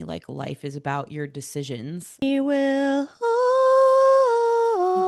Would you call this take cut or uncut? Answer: cut